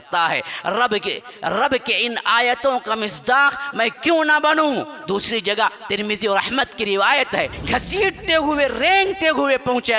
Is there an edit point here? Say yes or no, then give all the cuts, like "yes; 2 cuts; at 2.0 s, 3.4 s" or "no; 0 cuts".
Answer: yes; 1 cut; at 7.6 s